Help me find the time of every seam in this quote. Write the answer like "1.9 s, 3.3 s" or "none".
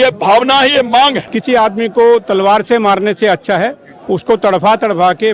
1.3 s